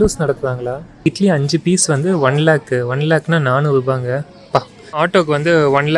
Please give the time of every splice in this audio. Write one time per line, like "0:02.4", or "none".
0:01.1
0:04.8

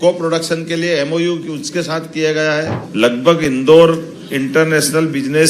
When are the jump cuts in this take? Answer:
0:02.8

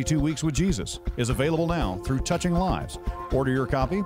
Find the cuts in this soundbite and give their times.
0:01.1

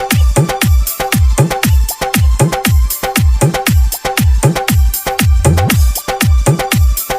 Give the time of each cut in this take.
0:04.6

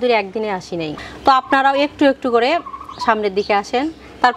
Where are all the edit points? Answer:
0:01.0

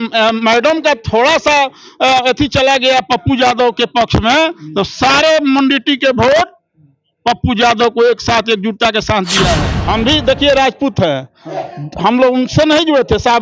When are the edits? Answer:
0:09.7

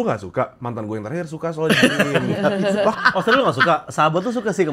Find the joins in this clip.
0:02.9

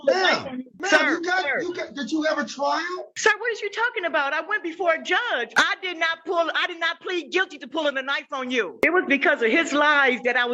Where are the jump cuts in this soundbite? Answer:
0:03.1
0:05.5
0:08.7

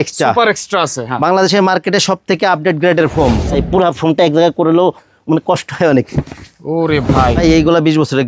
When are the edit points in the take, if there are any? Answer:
0:03.6
0:07.4

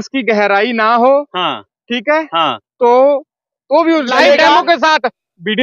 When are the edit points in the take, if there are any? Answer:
0:04.1

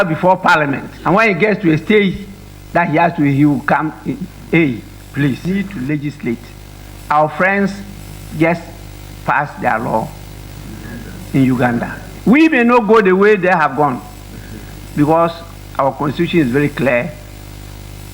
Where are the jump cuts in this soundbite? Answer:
0:05.4

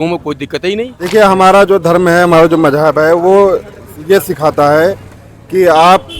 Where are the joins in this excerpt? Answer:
0:01.0

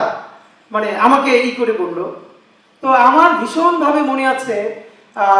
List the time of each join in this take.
none

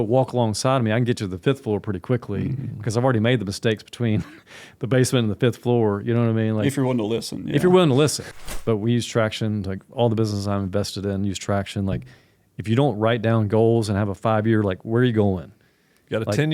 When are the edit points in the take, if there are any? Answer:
0:08.2

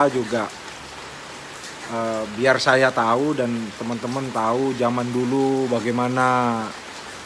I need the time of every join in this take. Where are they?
none

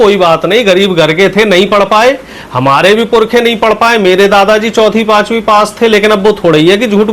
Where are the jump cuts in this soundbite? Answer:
none

